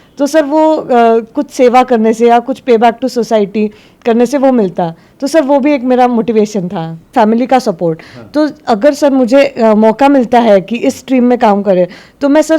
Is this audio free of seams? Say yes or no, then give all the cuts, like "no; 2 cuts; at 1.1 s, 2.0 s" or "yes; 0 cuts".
no; 1 cut; at 7.1 s